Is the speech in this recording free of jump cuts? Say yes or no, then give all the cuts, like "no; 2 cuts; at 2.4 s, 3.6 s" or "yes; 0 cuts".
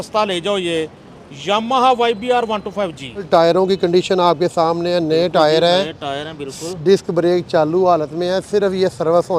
no; 1 cut; at 3.3 s